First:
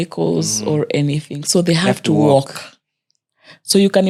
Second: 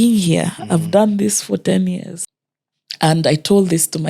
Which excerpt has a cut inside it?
second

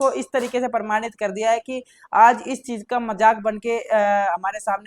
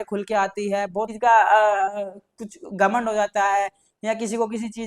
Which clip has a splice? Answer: second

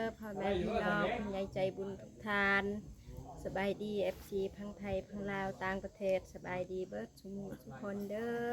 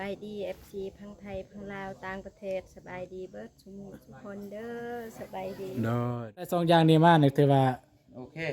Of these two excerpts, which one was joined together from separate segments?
second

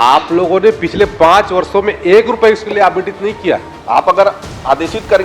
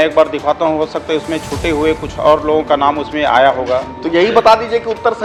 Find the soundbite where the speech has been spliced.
first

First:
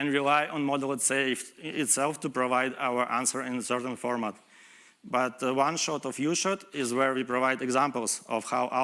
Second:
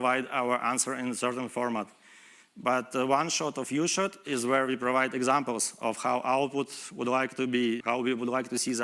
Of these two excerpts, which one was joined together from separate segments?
second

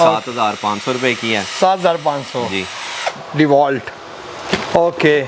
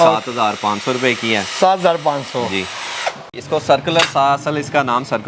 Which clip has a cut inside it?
second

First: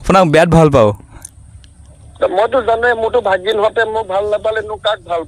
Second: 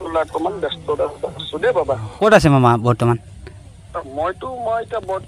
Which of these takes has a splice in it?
second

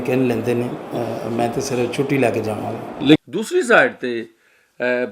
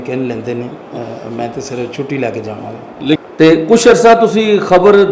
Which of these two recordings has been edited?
second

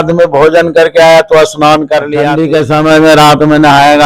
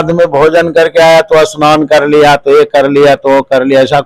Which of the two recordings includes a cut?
first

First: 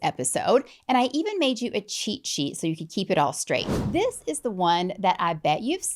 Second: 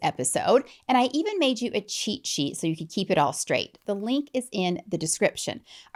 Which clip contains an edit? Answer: first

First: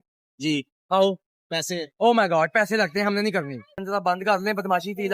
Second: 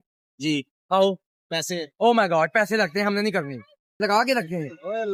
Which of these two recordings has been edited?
first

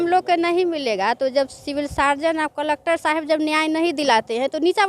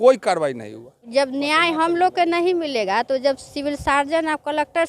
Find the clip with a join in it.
second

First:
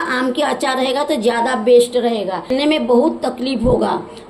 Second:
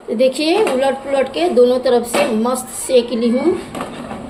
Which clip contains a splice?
first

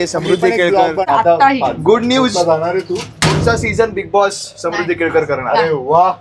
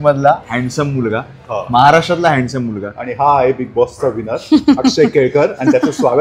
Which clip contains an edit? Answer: first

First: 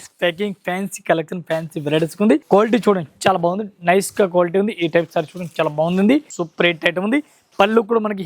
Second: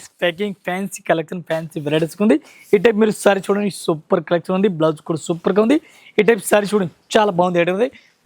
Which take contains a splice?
first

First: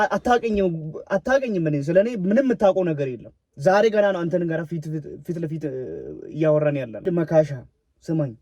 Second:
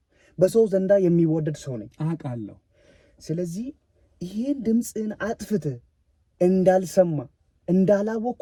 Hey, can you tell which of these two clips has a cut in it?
first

